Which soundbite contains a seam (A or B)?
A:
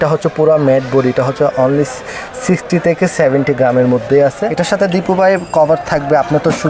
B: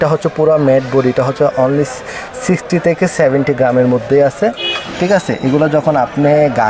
A